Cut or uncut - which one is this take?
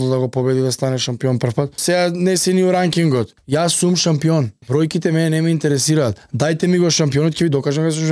cut